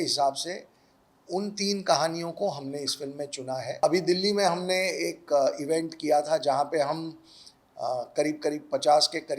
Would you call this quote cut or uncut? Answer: cut